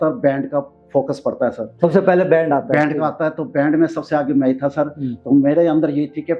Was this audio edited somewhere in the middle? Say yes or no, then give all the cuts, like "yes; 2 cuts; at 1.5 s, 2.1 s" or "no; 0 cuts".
no; 0 cuts